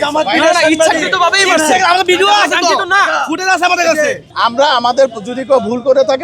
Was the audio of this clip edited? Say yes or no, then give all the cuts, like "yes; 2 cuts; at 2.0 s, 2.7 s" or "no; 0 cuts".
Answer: yes; 1 cut; at 4.3 s